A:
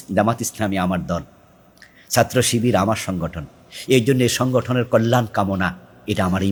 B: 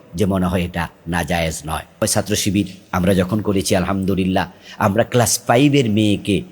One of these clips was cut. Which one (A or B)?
B